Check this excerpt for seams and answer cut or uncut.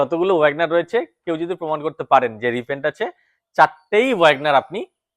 uncut